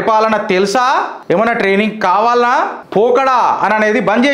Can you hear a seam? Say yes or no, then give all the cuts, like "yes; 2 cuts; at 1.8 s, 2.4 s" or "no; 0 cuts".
yes; 2 cuts; at 1.1 s, 2.8 s